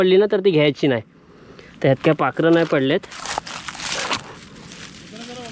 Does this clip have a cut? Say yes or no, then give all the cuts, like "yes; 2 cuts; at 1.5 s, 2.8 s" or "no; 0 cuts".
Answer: no; 0 cuts